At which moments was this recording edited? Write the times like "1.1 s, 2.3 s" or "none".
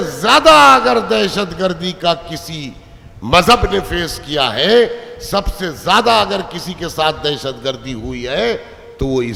none